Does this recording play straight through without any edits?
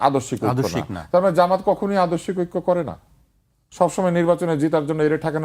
yes; 0 cuts

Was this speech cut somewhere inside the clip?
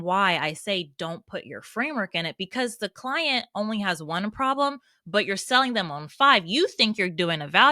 no; 0 cuts

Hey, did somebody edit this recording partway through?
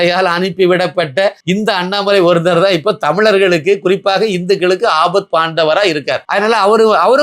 yes; 1 cut; at 6.2 s

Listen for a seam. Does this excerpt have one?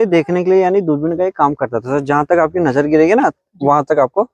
no; 0 cuts

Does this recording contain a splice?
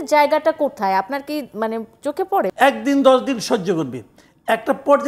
yes; 1 cut; at 2.5 s

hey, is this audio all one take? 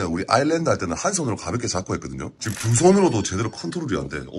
yes; 0 cuts

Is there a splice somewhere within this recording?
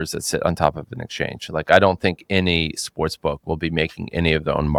no; 0 cuts

